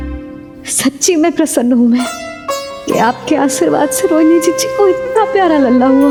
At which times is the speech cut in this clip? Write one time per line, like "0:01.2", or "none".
none